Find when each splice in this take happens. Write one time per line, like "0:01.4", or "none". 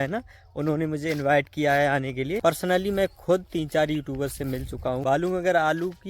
0:02.4
0:05.0